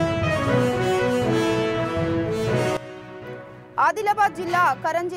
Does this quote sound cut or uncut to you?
uncut